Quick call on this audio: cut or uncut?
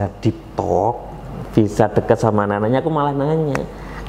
uncut